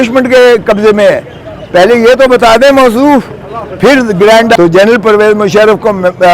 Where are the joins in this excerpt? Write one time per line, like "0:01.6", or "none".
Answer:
0:04.6